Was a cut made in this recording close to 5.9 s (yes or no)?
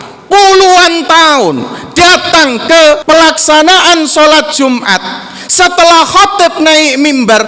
no